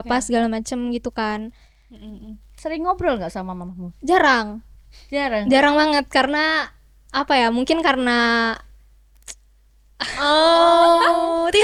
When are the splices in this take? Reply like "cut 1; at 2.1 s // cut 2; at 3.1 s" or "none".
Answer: none